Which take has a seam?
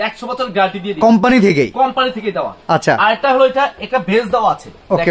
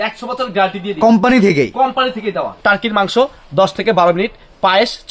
second; 1 cut; at 2.5 s

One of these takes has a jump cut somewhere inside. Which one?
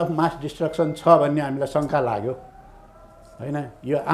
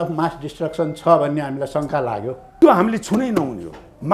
second; 1 cut; at 2.4 s

